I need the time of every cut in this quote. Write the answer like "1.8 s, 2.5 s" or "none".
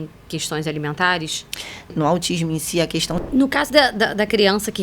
1.9 s, 3.2 s

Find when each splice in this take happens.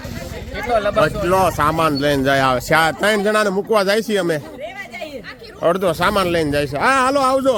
none

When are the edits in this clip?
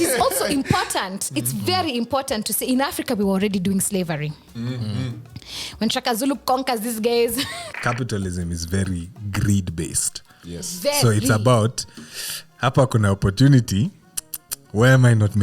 7.6 s

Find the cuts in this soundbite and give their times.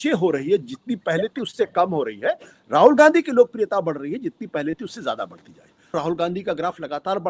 5.9 s

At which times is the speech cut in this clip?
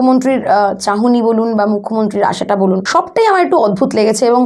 2.8 s

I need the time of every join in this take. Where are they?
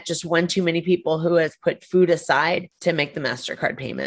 2.7 s

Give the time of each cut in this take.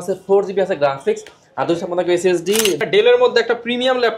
2.8 s

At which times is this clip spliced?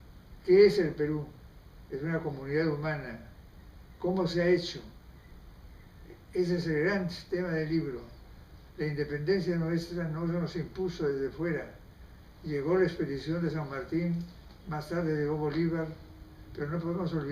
5.2 s

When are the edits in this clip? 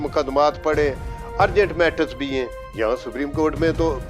none

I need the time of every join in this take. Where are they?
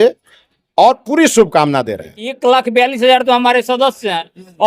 2.3 s

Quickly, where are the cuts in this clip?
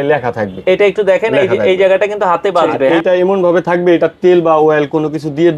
2.9 s

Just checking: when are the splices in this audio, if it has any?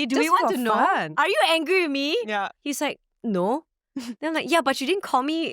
1.1 s, 2.5 s

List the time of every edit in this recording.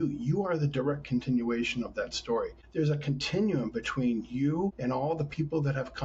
2.6 s, 4.8 s

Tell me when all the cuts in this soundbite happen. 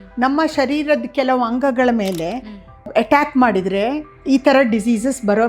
2.9 s, 4.1 s

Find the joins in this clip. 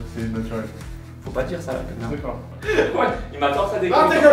2.5 s

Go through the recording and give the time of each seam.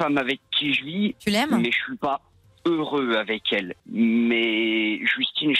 1.2 s, 3.8 s

